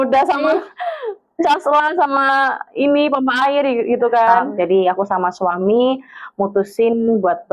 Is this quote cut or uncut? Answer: cut